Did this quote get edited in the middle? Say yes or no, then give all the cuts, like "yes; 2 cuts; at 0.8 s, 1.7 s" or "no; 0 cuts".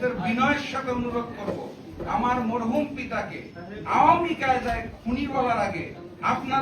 no; 0 cuts